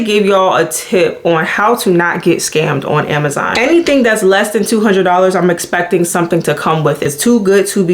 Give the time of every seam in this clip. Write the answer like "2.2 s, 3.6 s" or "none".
3.6 s, 7.0 s